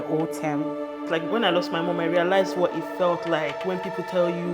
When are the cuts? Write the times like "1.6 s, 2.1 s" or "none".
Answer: 1.1 s